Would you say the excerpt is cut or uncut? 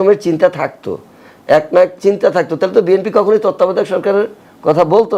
uncut